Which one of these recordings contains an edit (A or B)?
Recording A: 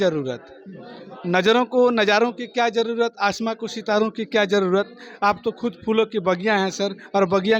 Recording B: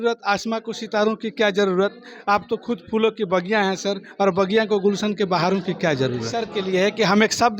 B